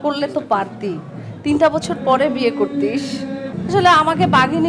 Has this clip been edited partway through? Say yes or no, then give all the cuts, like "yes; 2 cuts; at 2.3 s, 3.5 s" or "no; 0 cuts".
yes; 1 cut; at 3.5 s